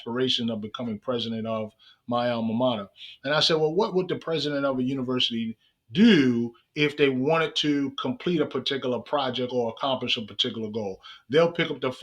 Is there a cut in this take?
no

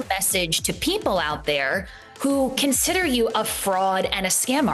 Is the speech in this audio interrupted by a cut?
no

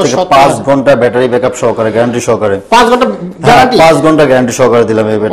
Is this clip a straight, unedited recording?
yes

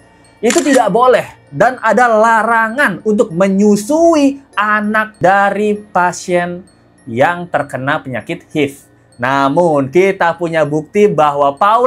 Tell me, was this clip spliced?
no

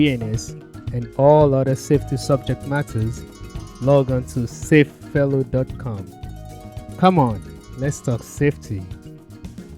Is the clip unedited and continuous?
no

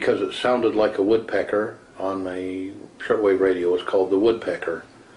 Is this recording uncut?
no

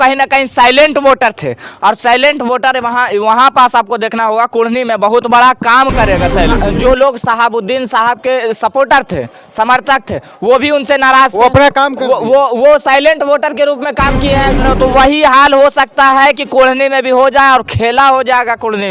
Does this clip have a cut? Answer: yes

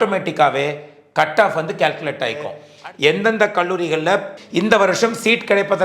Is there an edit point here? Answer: yes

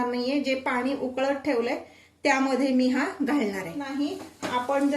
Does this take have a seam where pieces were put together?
yes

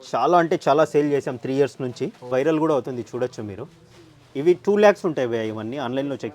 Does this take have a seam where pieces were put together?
yes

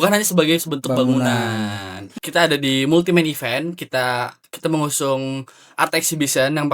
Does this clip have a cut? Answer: yes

